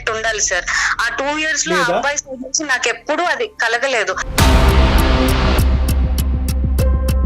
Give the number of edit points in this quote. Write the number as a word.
one